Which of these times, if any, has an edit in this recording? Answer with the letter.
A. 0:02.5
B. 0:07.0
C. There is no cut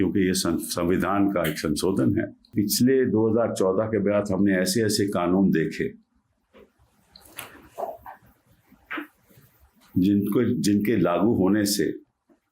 A